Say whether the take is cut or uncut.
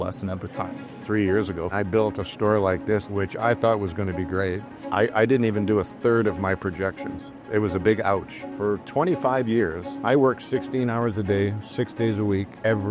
cut